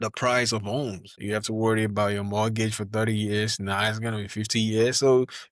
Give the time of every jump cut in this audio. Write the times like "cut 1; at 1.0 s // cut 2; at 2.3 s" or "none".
cut 1; at 1.1 s